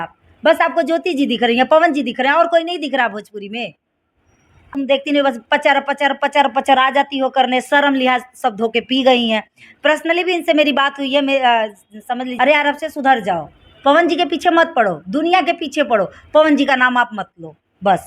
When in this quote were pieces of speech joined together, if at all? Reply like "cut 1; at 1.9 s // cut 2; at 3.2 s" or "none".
cut 1; at 4.6 s // cut 2; at 12.3 s